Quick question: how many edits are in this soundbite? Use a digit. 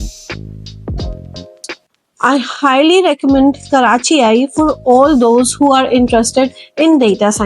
1